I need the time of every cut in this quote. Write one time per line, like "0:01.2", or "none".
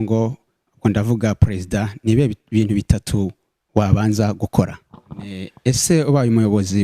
0:05.5

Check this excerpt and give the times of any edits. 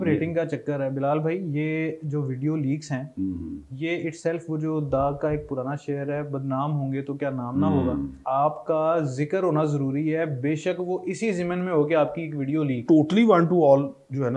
0:08.2
0:12.8

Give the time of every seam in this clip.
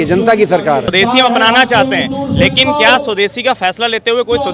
0:00.9

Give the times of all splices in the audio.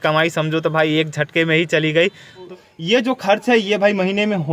0:02.5

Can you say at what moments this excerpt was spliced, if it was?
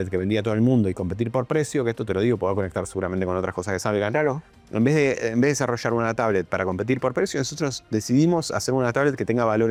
none

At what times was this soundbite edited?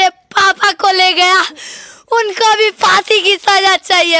none

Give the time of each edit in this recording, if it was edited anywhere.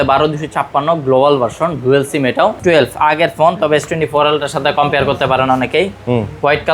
0:02.6

